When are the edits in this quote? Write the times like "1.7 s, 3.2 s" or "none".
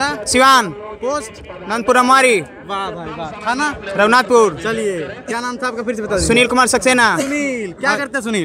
none